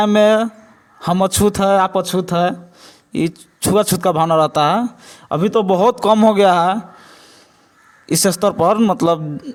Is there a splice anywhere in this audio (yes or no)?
no